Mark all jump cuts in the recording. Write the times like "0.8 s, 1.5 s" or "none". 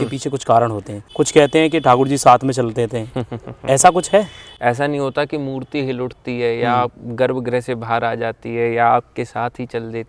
1.0 s, 4.4 s